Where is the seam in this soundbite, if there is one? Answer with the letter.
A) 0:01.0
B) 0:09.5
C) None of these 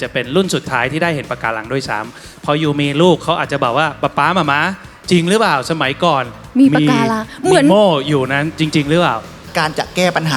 B